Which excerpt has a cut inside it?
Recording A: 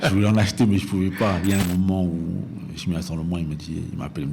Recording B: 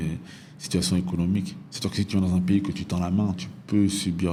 A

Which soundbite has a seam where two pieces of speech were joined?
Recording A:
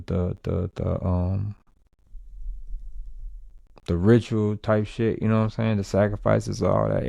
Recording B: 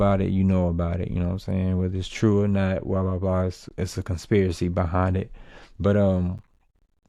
A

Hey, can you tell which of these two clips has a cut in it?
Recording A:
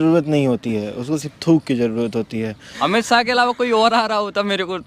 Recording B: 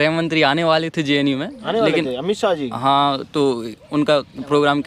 A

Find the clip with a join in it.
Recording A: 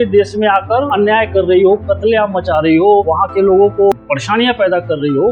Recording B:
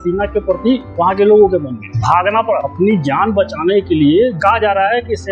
A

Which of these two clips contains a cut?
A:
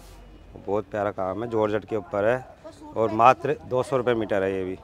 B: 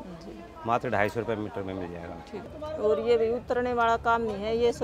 B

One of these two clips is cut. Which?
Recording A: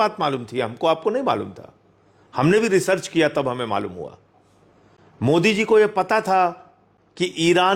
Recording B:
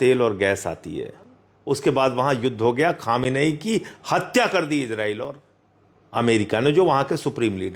B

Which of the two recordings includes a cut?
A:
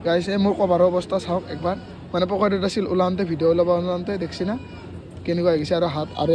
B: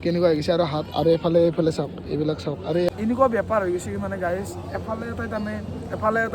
B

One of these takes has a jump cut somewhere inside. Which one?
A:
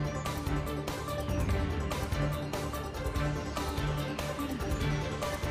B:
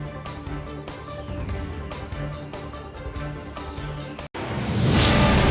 B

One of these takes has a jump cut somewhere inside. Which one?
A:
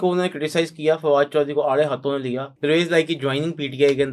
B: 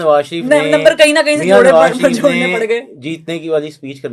A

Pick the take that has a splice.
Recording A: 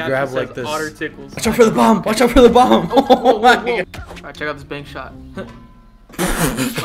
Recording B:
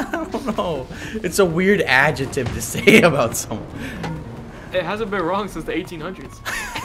A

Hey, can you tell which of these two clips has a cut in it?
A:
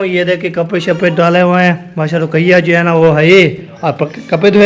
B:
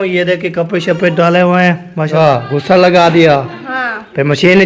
B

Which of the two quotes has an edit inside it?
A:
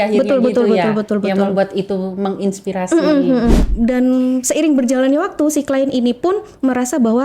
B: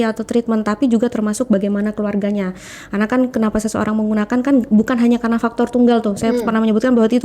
A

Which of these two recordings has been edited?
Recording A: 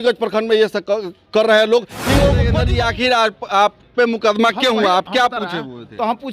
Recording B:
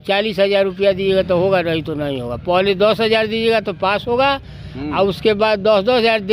A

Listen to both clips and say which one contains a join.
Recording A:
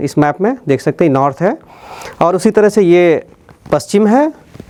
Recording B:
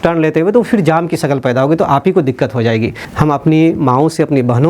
B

